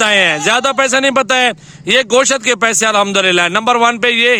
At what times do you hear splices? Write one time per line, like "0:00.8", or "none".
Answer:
none